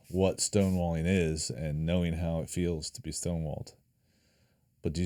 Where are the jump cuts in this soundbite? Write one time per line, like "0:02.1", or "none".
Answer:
none